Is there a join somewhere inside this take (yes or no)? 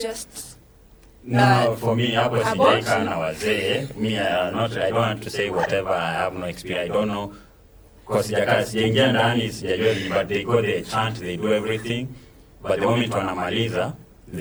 no